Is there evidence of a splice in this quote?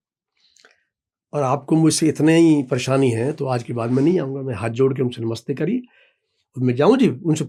no; 0 cuts

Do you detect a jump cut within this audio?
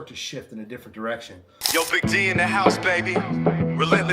yes; 1 cut; at 1.6 s

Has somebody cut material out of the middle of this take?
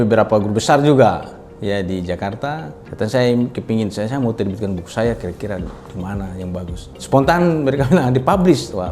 yes; 2 cuts; at 2.8 s, 6.9 s

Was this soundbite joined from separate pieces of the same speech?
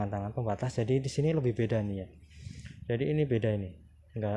no; 0 cuts

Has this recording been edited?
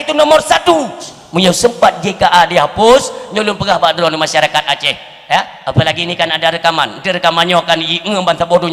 yes; 1 cut; at 1.1 s

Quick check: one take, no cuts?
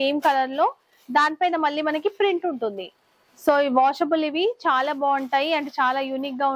yes; 0 cuts

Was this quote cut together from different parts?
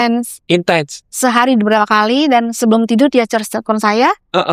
no; 0 cuts

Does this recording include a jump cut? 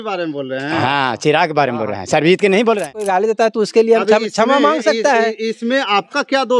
yes; 1 cut; at 3.0 s

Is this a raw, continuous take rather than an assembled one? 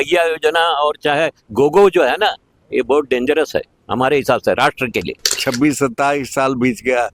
no; 1 cut; at 5.4 s

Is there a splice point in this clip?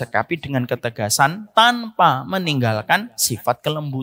no; 0 cuts

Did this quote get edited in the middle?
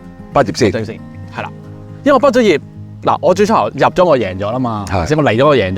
no; 0 cuts

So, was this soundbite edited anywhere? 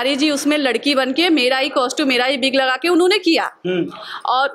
no; 0 cuts

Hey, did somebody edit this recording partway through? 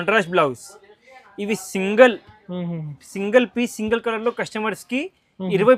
no; 0 cuts

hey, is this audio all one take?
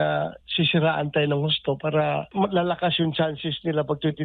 no; 1 cut; at 2.3 s

